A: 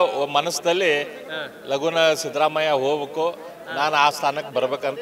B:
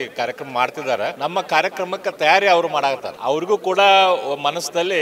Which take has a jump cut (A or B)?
B